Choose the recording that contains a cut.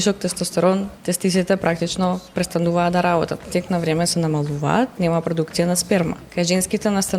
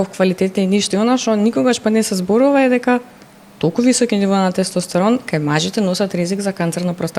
first; 4 cuts; at 0.9 s, 3.5 s, 5.0 s, 6.2 s

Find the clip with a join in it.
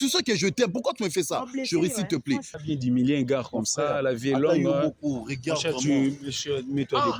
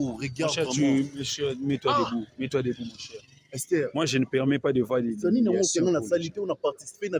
first; 1 cut; at 2.5 s

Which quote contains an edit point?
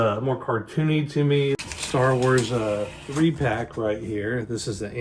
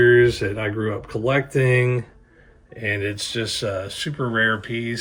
first; 1 cut; at 1.6 s

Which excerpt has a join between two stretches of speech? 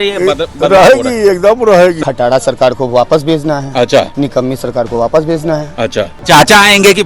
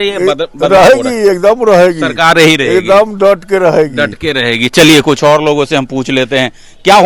first; 2 cuts; at 2.1 s, 6.1 s

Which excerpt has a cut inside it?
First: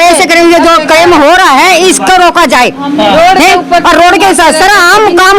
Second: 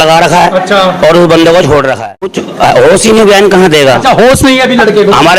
second; 1 cut; at 2.4 s

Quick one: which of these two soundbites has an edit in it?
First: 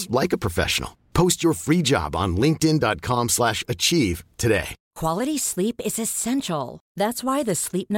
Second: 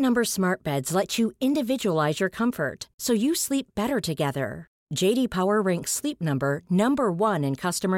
first; 1 cut; at 4.8 s

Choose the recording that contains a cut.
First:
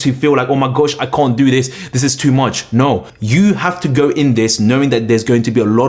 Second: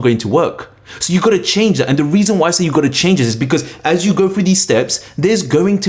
first; 1 cut; at 3.1 s

